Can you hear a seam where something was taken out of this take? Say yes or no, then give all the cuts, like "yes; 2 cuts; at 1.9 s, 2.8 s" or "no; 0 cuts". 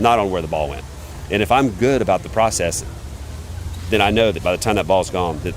no; 0 cuts